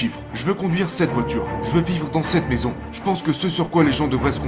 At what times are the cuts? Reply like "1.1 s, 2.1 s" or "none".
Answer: 2.9 s